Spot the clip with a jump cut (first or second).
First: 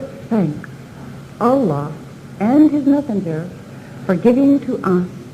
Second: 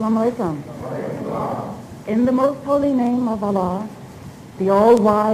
first